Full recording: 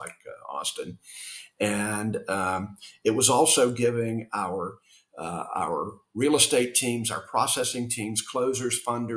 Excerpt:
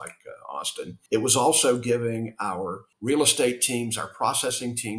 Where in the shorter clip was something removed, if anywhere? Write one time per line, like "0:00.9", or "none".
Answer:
0:00.9
0:02.9